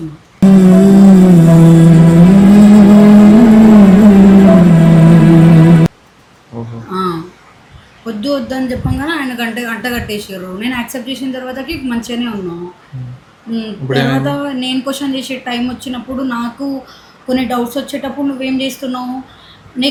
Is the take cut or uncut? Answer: uncut